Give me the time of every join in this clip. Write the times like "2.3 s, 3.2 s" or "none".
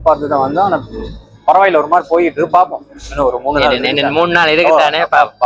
none